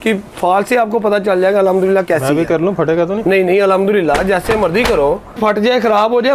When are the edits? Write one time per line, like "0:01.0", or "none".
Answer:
0:05.4